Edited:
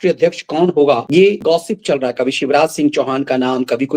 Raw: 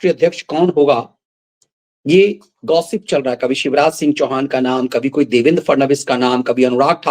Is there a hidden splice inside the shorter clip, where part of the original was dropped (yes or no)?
yes